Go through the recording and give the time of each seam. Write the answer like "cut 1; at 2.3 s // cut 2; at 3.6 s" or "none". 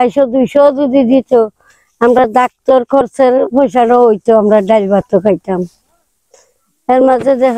none